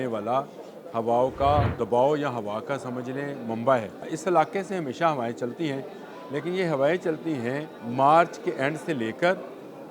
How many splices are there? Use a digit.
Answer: 3